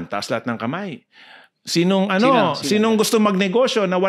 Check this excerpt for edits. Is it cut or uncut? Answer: uncut